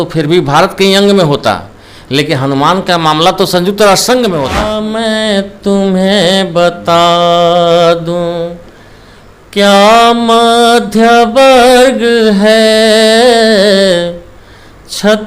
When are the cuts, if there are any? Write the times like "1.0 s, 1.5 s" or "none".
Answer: 4.7 s